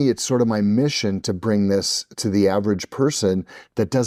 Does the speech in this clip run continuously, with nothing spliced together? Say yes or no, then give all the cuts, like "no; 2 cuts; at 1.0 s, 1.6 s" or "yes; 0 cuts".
yes; 0 cuts